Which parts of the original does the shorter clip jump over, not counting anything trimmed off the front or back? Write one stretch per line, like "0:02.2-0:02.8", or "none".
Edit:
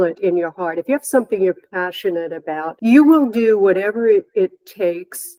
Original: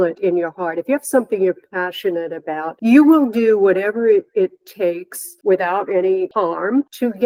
none